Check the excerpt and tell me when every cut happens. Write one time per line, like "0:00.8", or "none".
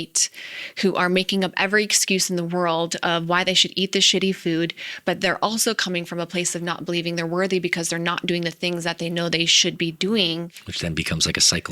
0:10.6